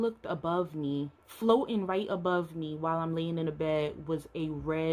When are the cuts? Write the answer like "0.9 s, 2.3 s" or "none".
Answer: 1.2 s